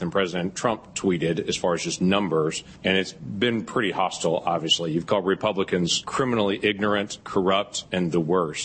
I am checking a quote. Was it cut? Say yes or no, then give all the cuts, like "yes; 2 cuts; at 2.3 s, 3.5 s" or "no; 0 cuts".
yes; 3 cuts; at 3.0 s, 6.0 s, 7.5 s